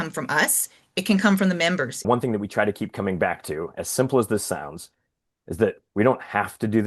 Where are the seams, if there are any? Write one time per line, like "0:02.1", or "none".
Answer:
0:02.0

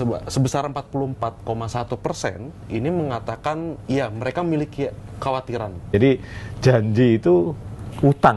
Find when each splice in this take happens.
0:05.9

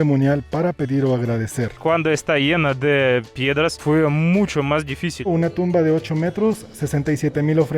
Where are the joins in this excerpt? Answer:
0:01.8
0:05.3

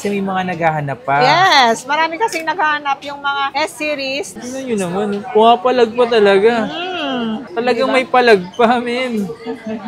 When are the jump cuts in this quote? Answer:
0:04.3

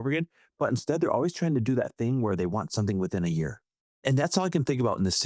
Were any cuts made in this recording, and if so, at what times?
0:03.9

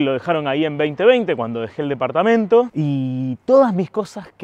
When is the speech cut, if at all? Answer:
0:02.7

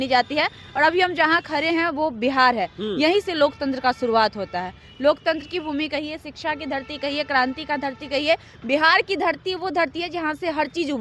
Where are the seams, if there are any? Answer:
none

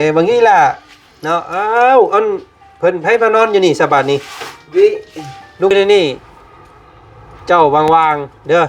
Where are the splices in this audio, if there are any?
0:05.7

